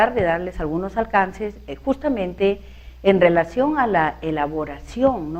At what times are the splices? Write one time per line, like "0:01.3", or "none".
none

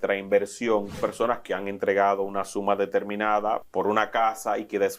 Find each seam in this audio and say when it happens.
0:01.0
0:03.7

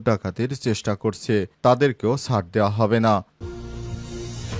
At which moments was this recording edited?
0:03.4

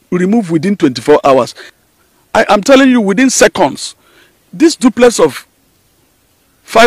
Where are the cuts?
0:01.7

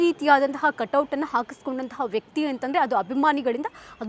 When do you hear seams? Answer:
none

